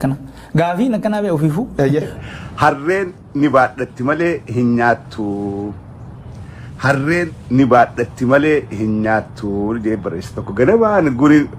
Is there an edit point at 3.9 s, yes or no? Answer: no